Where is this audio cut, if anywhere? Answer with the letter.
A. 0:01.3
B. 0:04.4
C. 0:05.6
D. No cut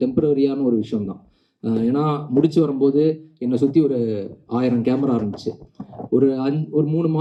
D